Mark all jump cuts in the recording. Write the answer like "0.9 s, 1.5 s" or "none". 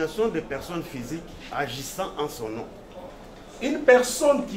3.1 s